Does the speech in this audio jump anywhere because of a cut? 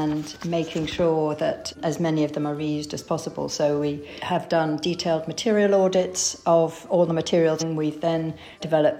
yes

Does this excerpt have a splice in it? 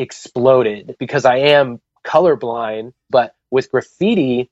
yes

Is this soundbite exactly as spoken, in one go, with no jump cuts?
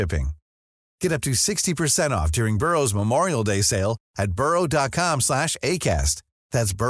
yes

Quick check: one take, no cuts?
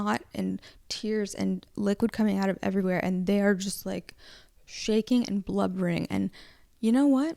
yes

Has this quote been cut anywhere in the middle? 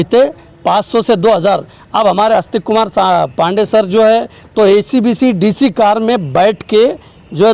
no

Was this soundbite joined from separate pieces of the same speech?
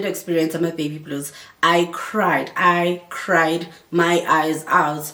no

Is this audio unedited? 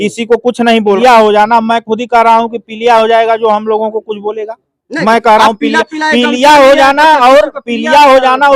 no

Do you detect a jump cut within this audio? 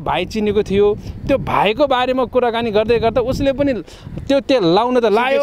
no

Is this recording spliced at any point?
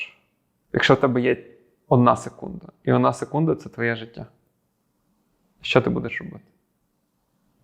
no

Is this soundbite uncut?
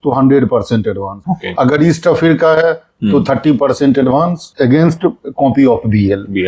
no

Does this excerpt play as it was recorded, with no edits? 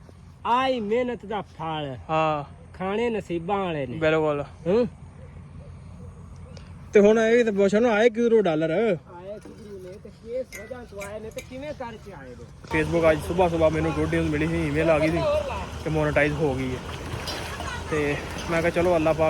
no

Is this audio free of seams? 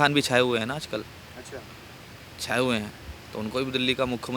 yes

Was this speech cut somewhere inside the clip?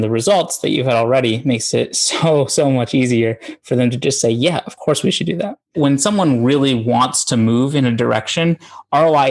yes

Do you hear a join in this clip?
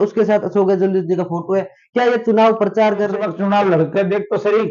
yes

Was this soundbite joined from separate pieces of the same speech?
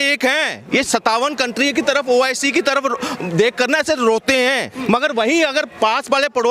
yes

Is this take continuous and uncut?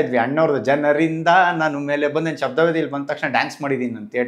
yes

